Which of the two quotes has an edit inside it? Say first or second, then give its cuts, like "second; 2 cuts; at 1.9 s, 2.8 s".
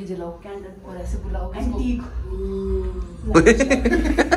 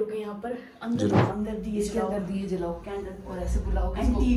second; 1 cut; at 1.3 s